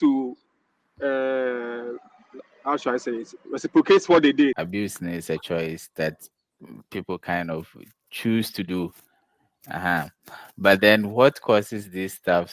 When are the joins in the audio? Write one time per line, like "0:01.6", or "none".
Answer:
0:04.6